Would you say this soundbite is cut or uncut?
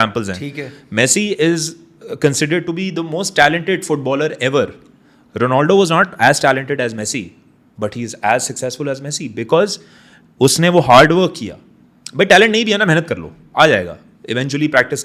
uncut